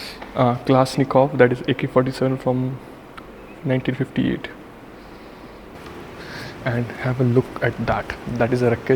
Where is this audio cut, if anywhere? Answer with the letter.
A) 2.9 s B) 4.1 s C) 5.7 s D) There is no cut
C